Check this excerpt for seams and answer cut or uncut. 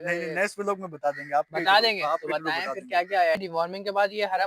cut